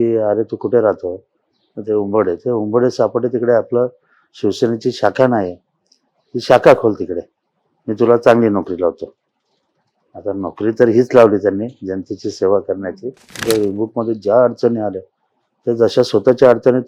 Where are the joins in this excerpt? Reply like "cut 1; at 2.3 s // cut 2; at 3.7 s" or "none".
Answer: cut 1; at 13.4 s